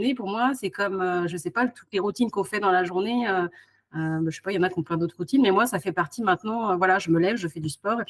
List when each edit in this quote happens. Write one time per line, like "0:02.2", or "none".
none